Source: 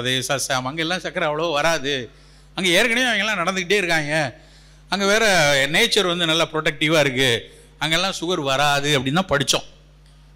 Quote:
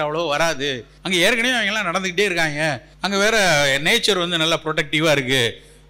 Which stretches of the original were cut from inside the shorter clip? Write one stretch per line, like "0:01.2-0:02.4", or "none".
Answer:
0:02.1-0:02.4
0:04.4-0:04.8